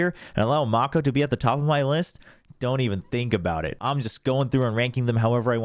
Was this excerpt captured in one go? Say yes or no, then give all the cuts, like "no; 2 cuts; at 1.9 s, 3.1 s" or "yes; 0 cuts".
no; 1 cut; at 3.8 s